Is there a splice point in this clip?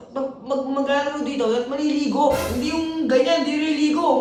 no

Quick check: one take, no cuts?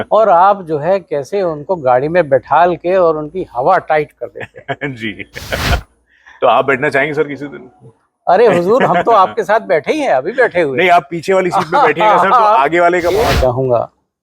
no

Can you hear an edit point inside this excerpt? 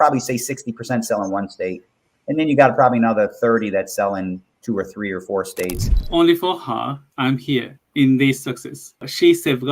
yes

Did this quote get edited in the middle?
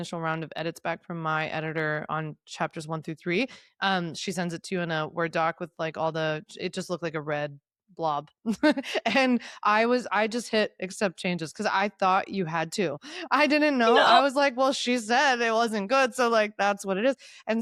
no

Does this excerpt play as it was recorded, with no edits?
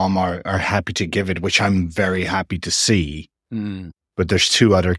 no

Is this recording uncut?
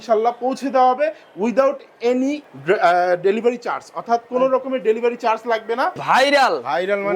no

